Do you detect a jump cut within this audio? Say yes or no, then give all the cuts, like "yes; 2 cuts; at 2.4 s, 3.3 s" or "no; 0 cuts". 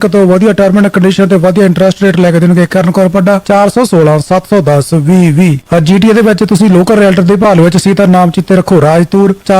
yes; 1 cut; at 5.6 s